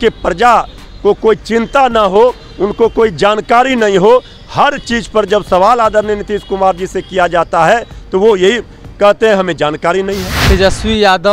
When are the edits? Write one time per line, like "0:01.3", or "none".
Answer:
0:10.4

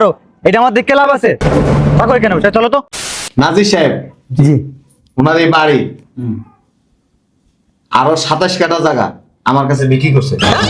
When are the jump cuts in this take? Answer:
0:03.0

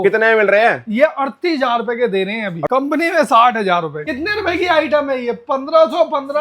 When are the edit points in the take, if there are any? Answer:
0:02.6
0:04.0

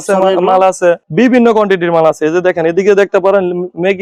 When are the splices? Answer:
none

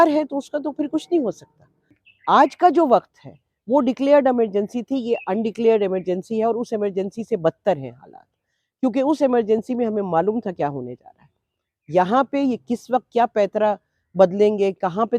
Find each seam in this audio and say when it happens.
0:02.0

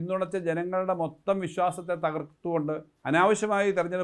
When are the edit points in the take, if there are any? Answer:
0:02.9

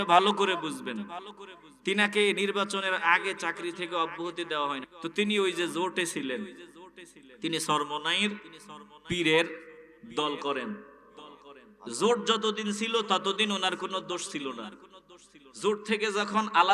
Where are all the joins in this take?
0:04.9

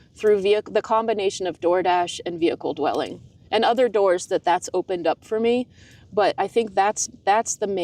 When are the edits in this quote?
none

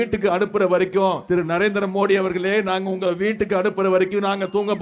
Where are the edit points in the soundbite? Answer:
0:01.2

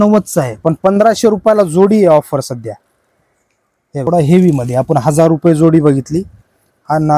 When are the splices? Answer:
0:04.1

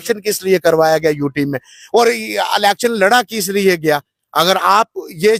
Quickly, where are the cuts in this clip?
none

